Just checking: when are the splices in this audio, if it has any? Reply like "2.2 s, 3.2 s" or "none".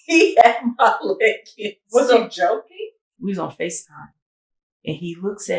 3.0 s